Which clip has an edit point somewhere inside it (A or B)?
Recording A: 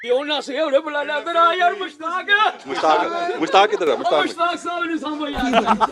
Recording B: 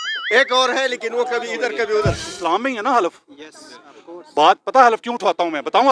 B